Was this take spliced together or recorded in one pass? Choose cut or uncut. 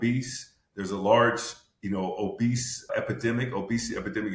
cut